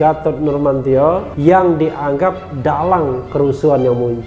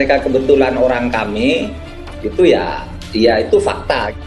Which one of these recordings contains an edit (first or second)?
first